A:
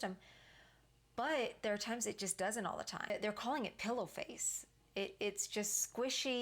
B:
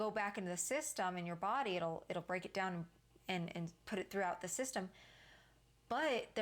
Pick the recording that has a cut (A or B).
A